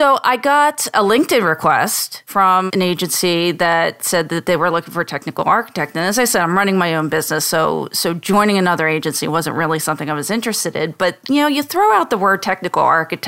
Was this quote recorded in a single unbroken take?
no; 2 cuts; at 0.9 s, 2.4 s

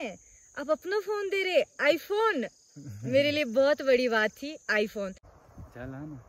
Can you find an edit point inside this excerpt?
yes; 1 cut; at 5.3 s

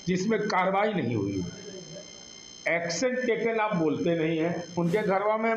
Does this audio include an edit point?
yes; 1 cut; at 4.7 s

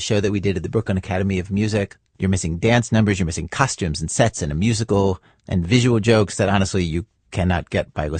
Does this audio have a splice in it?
no; 0 cuts

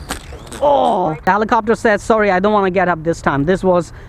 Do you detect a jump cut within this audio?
yes; 1 cut; at 1.2 s

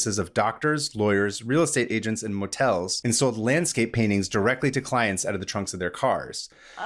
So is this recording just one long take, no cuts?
no; 1 cut; at 2.9 s

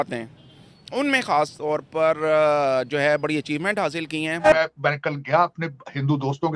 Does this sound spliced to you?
yes; 1 cut; at 4.4 s

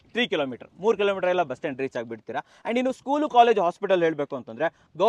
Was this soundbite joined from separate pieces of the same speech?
no; 0 cuts

